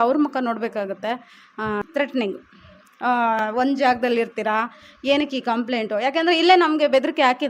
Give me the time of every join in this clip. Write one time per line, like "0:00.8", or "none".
0:01.8